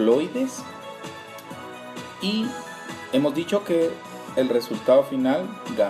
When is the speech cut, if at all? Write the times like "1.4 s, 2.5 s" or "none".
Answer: 2.3 s